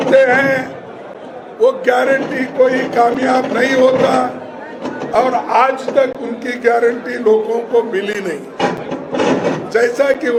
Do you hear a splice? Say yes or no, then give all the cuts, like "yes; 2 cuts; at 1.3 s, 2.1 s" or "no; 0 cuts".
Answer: no; 0 cuts